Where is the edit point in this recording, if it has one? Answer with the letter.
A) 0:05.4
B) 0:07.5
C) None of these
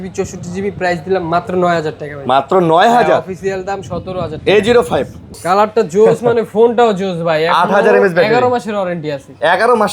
A